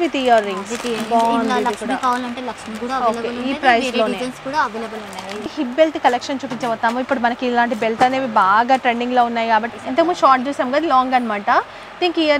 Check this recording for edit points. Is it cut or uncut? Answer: cut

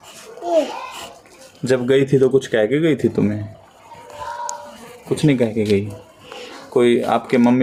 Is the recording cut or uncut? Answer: uncut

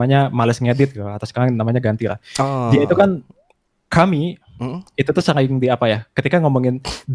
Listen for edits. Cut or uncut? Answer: uncut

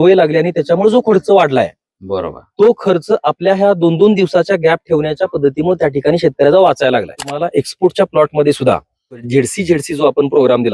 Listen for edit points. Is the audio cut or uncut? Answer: cut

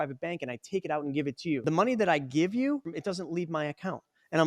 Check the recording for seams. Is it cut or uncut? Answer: cut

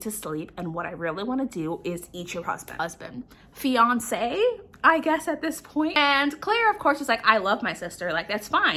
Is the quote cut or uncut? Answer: uncut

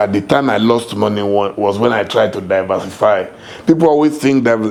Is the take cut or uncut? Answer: uncut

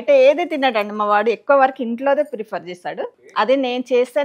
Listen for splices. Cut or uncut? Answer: cut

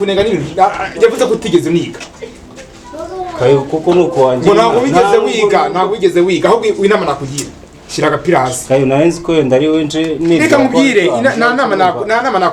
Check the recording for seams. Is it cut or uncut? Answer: uncut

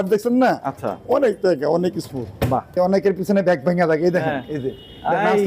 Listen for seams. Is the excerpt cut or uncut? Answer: cut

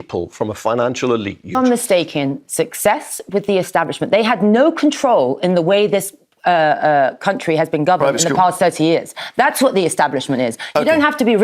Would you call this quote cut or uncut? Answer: cut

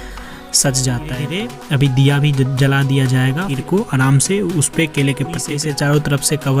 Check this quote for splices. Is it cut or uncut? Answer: cut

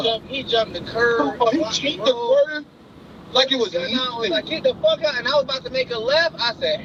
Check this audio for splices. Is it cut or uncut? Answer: uncut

